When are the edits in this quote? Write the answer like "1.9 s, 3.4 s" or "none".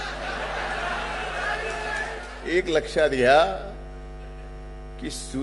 2.3 s